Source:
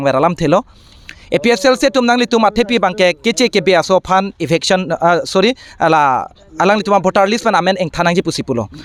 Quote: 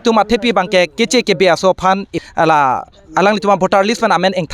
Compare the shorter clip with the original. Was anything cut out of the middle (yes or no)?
yes